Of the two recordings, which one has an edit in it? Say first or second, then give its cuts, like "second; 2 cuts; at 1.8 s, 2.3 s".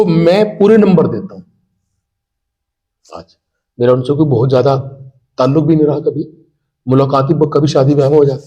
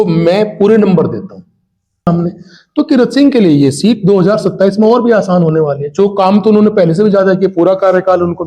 second; 1 cut; at 2.1 s